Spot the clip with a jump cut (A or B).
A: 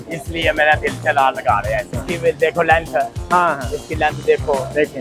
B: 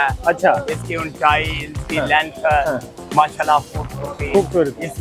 A